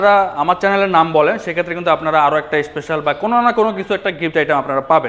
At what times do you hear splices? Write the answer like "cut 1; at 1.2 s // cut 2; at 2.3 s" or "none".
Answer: none